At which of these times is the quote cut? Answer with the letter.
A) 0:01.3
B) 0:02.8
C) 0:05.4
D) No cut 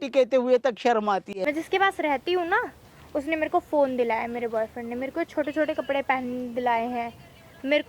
A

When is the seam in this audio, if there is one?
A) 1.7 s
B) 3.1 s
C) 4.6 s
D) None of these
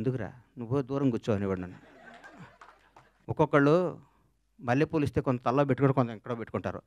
B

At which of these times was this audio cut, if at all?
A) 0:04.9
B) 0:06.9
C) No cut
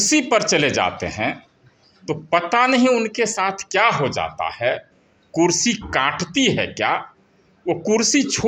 C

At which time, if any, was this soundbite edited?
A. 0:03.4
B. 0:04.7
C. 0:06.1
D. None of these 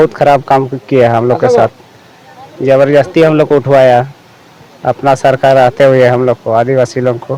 D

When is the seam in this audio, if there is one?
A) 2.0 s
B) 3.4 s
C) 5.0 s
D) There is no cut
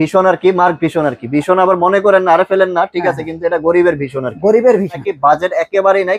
C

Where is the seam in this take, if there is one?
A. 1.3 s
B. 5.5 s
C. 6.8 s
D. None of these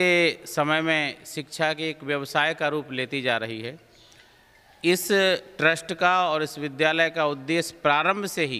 D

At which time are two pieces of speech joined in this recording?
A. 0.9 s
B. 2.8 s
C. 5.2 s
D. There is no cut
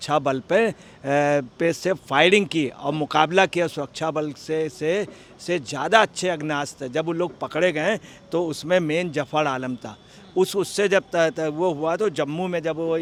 D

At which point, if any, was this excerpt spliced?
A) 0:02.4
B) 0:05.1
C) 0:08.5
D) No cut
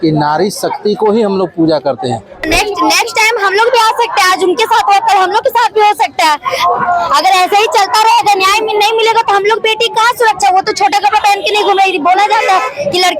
A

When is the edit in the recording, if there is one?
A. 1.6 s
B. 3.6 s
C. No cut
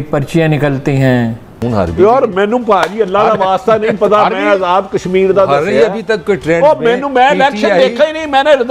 A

